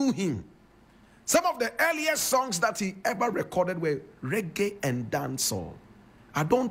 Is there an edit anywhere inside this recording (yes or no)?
no